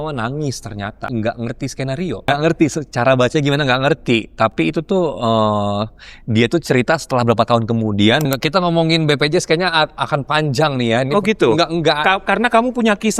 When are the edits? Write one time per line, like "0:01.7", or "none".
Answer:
0:01.0
0:02.3
0:08.2